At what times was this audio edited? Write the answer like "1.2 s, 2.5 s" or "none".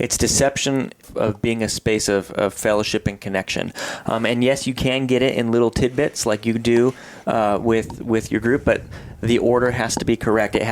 1.1 s